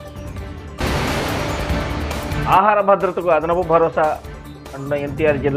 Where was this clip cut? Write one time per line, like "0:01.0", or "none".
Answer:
0:00.8
0:02.3